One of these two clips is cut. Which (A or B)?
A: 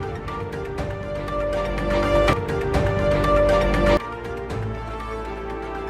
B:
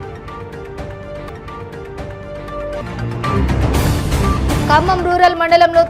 A